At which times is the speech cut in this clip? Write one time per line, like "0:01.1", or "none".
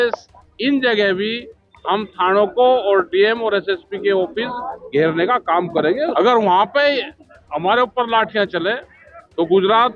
0:06.1